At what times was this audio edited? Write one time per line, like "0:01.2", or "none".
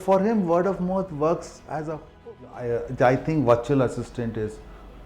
0:02.6